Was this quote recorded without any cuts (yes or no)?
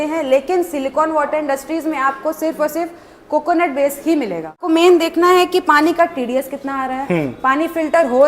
no